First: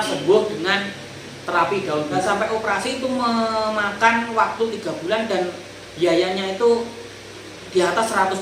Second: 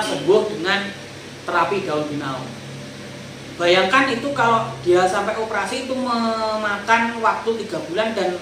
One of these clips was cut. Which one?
first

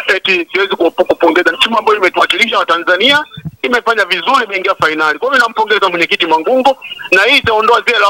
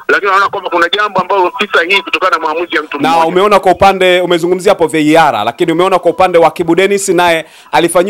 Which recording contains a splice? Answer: second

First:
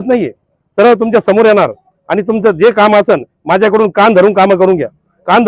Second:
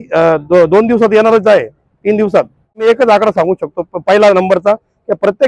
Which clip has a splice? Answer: second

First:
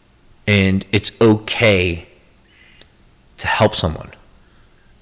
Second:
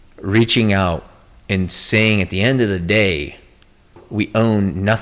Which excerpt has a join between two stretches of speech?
second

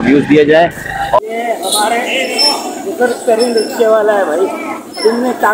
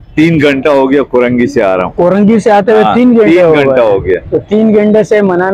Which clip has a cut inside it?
first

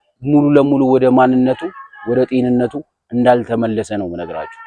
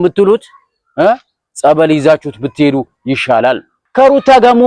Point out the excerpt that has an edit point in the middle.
second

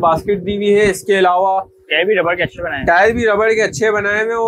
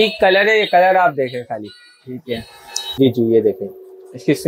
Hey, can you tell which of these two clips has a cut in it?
second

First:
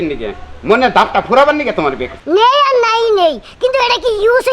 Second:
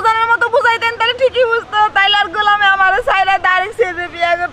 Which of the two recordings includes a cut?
first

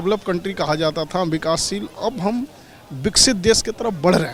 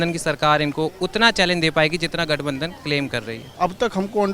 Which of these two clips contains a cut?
second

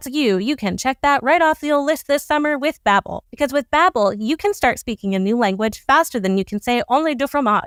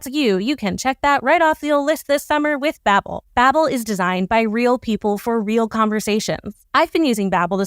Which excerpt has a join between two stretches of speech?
second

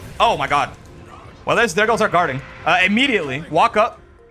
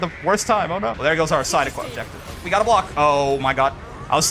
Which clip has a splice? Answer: second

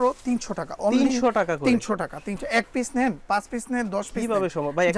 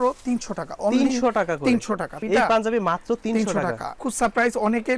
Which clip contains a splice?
second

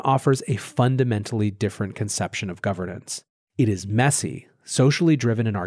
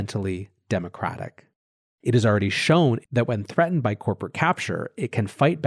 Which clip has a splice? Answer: second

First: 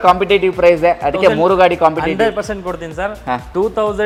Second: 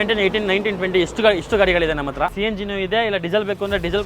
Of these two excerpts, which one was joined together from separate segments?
second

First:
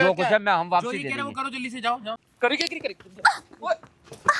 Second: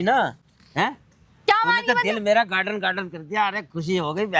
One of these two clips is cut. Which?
first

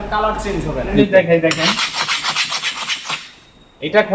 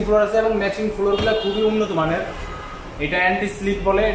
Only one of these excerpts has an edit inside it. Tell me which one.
first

